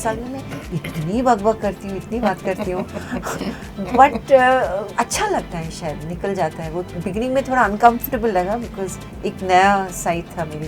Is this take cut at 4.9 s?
yes; 1 cut; at 4.9 s

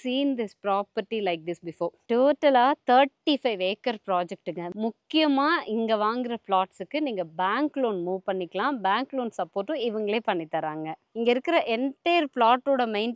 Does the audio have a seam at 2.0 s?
yes; 3 cuts; at 2.0 s, 4.7 s, 11.0 s

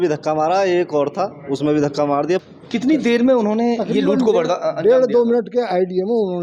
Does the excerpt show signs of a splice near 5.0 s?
no; 1 cut; at 2.4 s

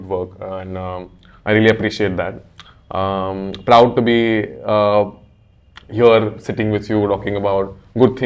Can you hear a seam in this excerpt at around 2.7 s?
no; 0 cuts

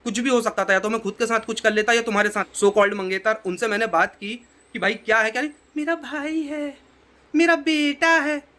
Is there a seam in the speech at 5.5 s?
no; 1 cut; at 2.4 s

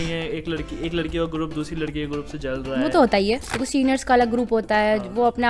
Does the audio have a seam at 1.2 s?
no; 1 cut; at 3.5 s

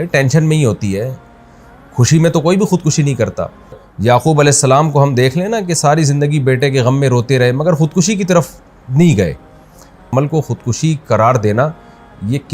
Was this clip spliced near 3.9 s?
yes; 2 cuts; at 3.9 s, 10.1 s

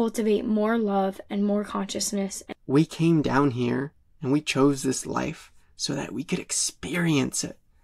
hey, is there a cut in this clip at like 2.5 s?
yes; 1 cut; at 2.5 s

